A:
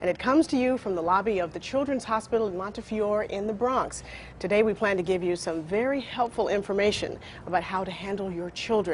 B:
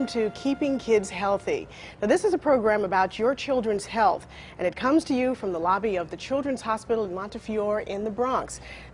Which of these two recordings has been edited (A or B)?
B